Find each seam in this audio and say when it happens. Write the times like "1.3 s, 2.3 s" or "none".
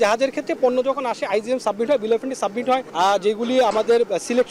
2.9 s